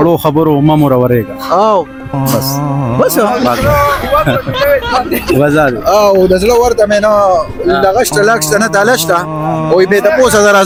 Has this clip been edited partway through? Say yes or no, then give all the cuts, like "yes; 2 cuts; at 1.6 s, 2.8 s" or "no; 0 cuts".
no; 0 cuts